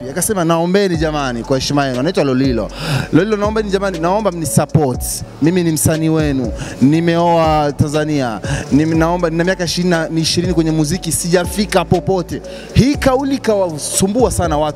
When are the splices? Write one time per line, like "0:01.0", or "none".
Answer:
none